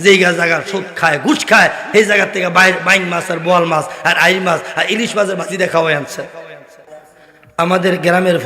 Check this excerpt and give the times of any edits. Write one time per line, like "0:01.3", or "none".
0:06.9